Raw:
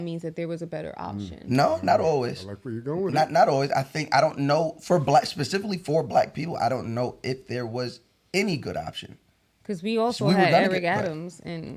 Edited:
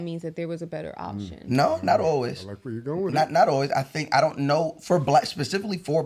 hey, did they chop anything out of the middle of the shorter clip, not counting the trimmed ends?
no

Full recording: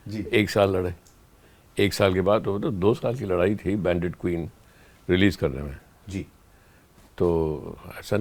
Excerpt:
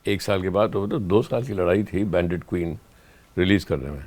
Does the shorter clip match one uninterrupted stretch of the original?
yes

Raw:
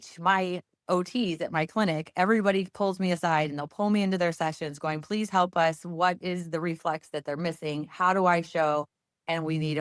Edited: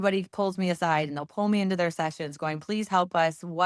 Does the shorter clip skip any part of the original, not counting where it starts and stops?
no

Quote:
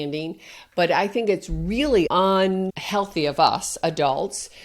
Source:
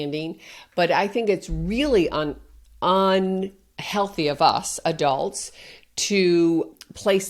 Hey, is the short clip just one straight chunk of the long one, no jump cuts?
no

